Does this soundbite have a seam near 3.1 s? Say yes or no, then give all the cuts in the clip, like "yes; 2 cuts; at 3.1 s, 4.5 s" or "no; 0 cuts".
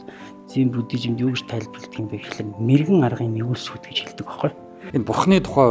no; 1 cut; at 4.8 s